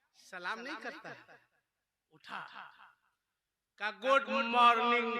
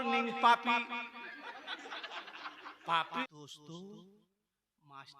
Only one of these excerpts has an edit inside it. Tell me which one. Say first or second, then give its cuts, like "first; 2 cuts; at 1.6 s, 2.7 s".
second; 1 cut; at 3.2 s